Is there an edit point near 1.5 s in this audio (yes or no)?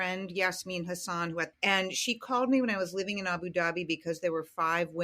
yes